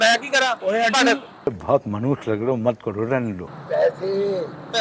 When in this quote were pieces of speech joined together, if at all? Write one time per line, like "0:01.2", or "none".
0:01.4